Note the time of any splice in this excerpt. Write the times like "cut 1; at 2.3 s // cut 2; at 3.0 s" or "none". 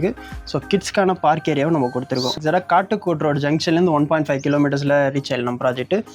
cut 1; at 2.4 s